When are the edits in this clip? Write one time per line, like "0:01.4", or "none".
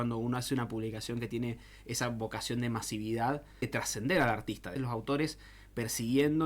0:03.8
0:04.7